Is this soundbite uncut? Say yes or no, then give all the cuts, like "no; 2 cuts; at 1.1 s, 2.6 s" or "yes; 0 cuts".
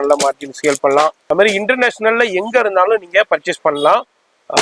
no; 1 cut; at 1.2 s